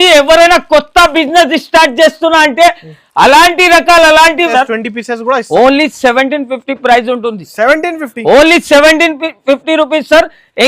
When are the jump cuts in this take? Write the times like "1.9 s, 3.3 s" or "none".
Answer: 4.5 s